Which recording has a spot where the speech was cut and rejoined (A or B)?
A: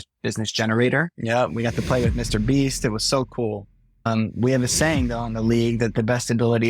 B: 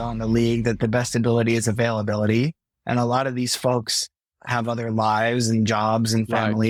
A